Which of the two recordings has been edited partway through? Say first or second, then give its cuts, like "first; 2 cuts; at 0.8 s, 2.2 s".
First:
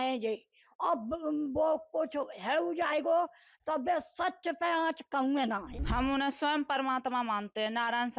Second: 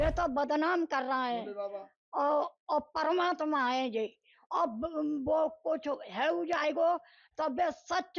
first; 1 cut; at 5.7 s